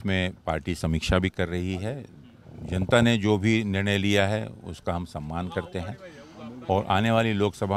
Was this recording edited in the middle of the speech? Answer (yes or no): no